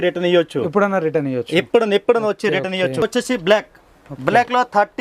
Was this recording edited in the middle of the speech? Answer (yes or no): yes